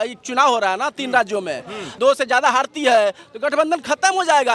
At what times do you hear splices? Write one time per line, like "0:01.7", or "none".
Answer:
0:01.8